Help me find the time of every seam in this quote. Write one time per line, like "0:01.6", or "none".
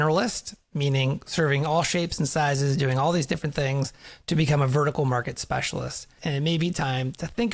0:06.1